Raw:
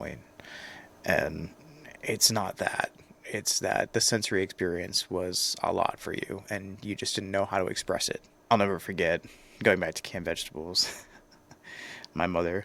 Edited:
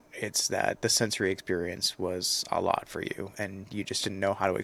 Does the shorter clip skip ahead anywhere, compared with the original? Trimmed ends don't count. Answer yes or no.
no